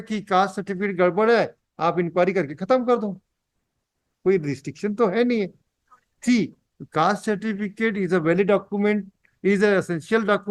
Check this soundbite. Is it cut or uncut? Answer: uncut